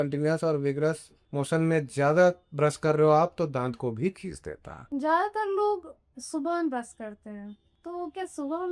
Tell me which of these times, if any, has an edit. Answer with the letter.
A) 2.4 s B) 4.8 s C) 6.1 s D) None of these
B